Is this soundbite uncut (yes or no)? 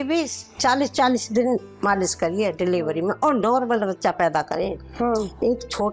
yes